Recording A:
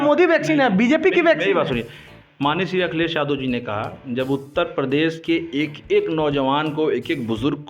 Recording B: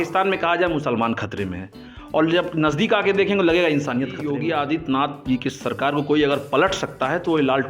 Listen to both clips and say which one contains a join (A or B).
B